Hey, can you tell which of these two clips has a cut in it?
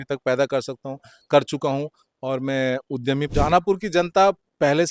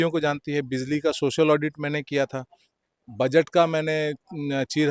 first; 1 cut; at 3.3 s

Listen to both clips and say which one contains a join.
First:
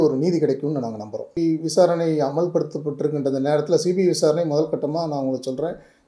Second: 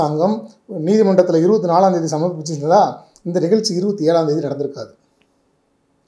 first; 1 cut; at 1.4 s

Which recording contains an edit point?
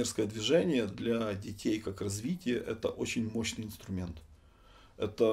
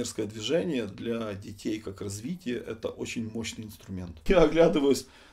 second; 1 cut; at 4.1 s

